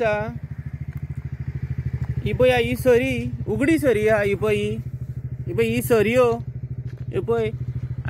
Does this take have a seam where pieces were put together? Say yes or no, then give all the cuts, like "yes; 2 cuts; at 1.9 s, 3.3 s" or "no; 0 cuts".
no; 0 cuts